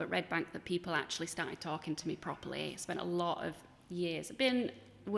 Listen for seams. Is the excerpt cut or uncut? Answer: uncut